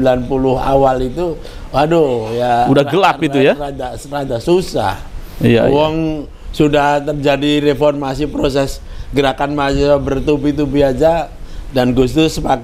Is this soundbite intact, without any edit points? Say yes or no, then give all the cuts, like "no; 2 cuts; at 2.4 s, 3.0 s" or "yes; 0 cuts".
yes; 0 cuts